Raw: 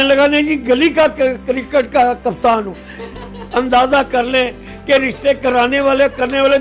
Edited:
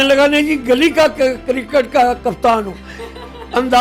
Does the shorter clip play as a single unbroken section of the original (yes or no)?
yes